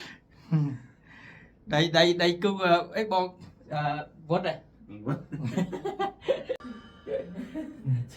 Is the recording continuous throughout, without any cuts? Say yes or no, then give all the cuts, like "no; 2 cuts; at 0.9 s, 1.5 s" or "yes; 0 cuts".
no; 1 cut; at 6.6 s